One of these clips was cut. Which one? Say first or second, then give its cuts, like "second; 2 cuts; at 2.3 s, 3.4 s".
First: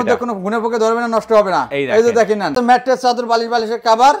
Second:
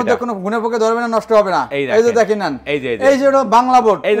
first; 1 cut; at 2.6 s